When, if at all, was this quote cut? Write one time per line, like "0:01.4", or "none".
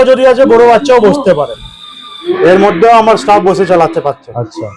0:02.3